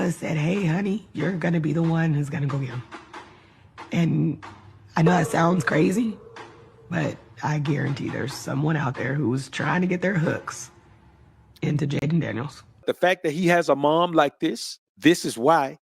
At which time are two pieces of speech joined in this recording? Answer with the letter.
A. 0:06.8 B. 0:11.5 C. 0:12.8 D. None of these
C